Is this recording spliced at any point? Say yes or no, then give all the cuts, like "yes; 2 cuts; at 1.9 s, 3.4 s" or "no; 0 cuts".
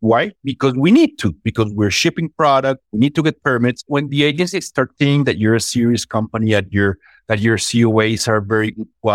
yes; 2 cuts; at 2.8 s, 3.9 s